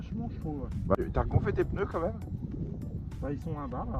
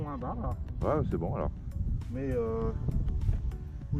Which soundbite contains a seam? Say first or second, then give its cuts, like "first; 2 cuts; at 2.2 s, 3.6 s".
first; 1 cut; at 0.9 s